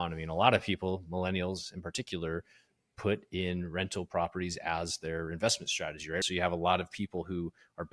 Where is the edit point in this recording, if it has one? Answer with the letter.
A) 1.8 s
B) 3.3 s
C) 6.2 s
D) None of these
C